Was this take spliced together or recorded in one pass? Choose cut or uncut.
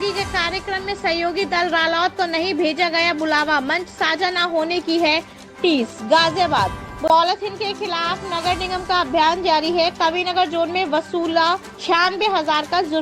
cut